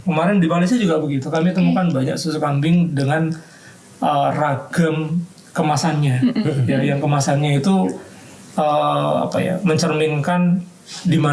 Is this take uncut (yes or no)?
yes